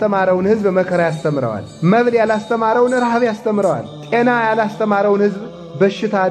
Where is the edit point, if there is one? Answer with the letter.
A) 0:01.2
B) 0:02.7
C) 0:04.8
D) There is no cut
D